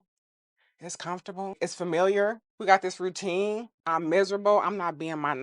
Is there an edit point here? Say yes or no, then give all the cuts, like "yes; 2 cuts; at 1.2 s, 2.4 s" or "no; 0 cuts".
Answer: yes; 3 cuts; at 1.6 s, 2.5 s, 3.7 s